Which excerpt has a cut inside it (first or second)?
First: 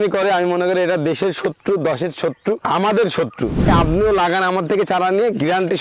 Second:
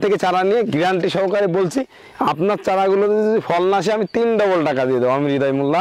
first